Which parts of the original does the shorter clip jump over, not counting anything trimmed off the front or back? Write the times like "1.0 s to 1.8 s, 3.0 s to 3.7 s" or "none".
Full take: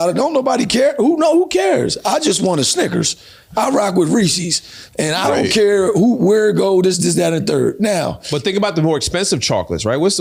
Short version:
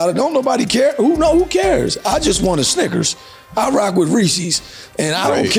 none